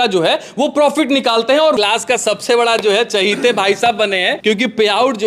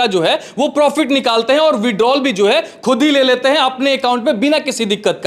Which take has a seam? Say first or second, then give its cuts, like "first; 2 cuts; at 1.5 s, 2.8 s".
first; 2 cuts; at 1.8 s, 4.3 s